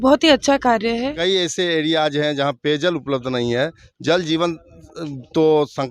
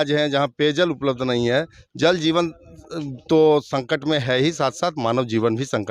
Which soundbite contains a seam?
first; 1 cut; at 1.2 s

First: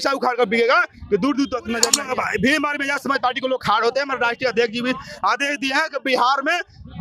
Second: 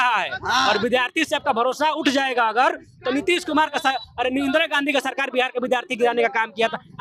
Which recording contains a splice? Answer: first; 1 cut; at 2.0 s

